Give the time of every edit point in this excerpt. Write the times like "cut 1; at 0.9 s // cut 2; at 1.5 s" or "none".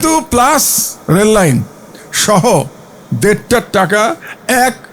none